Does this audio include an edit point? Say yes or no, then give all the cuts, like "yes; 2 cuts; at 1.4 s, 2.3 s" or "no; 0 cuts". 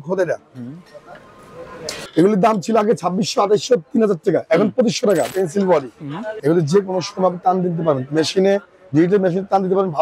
yes; 3 cuts; at 1.9 s, 5.3 s, 6.3 s